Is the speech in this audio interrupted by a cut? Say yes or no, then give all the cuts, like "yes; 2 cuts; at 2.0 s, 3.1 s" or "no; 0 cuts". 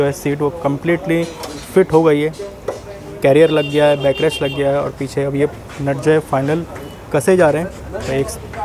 no; 0 cuts